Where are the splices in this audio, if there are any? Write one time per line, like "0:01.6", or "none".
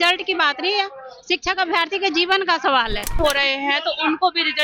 0:03.2